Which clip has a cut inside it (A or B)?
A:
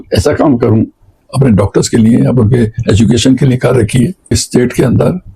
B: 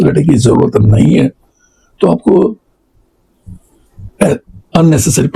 A